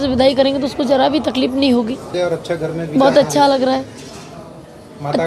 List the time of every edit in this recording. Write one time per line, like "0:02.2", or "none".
0:02.1

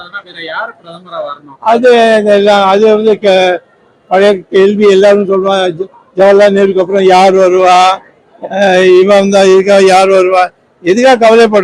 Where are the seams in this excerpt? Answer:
none

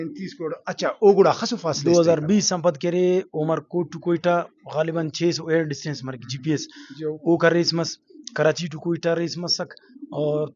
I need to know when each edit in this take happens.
0:01.7

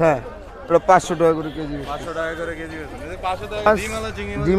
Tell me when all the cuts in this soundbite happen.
0:03.7

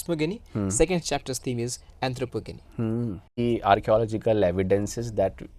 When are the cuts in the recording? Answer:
0:03.3

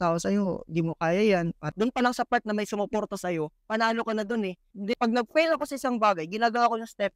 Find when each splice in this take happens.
0:01.6
0:05.0

